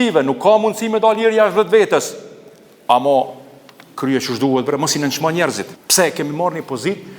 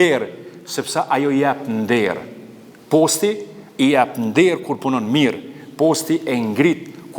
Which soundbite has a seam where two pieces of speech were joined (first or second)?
first